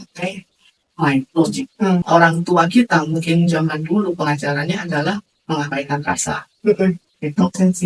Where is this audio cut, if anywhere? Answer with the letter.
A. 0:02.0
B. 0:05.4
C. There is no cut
A